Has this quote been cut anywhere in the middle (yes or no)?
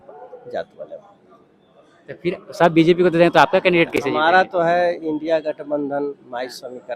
no